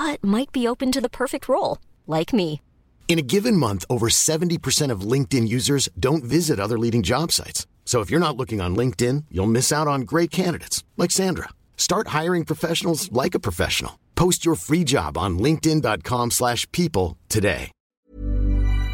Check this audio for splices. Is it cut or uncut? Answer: cut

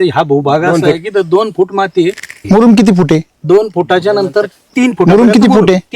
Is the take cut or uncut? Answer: cut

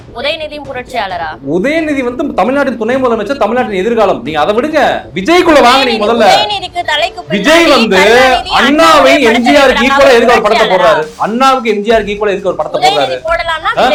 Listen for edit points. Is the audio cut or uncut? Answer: uncut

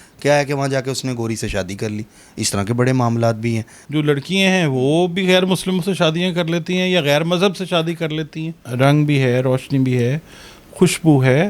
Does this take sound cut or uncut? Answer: cut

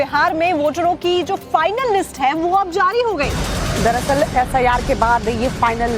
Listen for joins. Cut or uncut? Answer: cut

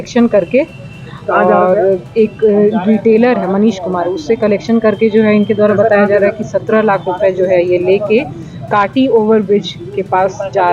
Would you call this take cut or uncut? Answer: uncut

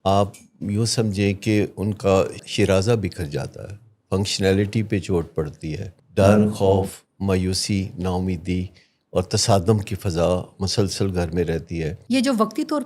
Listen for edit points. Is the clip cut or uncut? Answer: cut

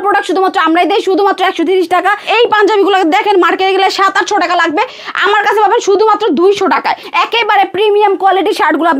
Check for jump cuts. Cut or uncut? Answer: cut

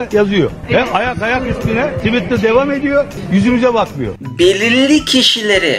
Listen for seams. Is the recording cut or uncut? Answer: cut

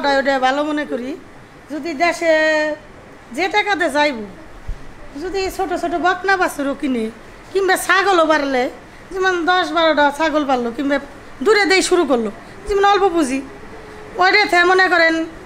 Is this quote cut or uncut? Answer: uncut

